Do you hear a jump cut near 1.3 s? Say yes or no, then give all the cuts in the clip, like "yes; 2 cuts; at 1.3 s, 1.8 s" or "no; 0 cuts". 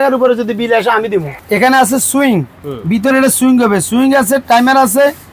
yes; 1 cut; at 1.3 s